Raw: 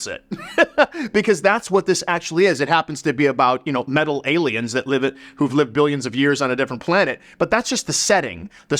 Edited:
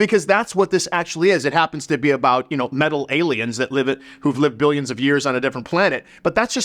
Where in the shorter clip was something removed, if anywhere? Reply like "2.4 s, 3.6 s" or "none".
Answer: none